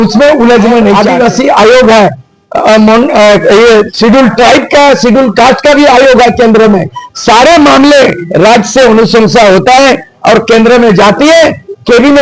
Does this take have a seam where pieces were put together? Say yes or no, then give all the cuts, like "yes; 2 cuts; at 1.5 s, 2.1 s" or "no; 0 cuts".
yes; 1 cut; at 1.0 s